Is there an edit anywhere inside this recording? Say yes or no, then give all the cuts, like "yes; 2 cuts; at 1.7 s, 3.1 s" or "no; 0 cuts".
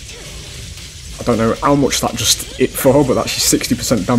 no; 0 cuts